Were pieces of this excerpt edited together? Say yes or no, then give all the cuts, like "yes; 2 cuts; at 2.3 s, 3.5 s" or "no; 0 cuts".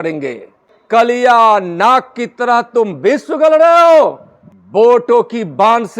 yes; 2 cuts; at 0.9 s, 4.8 s